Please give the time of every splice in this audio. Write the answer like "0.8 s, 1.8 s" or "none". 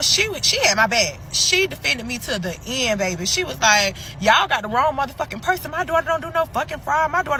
none